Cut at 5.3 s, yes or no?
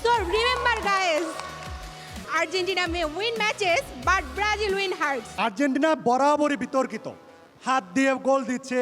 yes